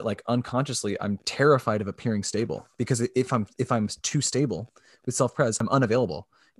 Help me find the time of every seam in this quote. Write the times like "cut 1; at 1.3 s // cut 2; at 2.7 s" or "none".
cut 1; at 5.6 s